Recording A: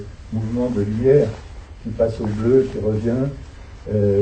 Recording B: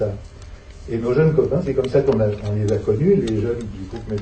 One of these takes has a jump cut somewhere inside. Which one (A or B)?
A